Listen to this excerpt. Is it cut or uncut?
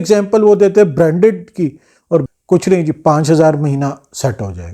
cut